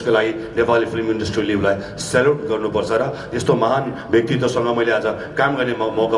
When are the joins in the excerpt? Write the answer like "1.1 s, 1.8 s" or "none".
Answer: none